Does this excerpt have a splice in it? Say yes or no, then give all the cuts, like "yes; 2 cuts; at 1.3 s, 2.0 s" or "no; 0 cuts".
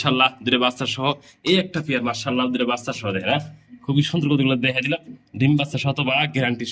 no; 0 cuts